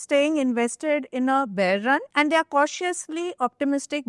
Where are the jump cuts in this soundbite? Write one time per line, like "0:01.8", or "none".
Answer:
0:02.1